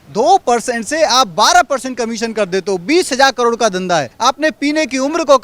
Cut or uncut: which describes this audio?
cut